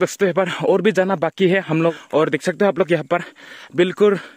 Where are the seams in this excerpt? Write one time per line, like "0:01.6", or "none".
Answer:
0:01.9